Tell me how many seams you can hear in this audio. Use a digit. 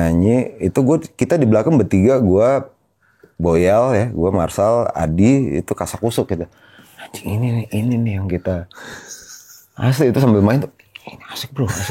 0